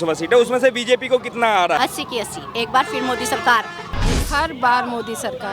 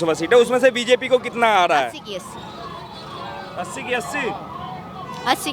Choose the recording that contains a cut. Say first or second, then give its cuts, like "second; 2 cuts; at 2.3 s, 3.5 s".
first; 2 cuts; at 1.8 s, 4.2 s